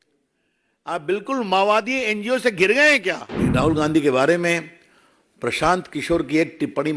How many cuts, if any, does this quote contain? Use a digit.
1